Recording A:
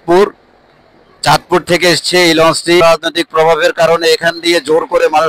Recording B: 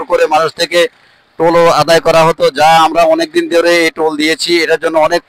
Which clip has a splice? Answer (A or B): A